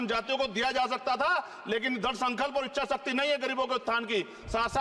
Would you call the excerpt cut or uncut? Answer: uncut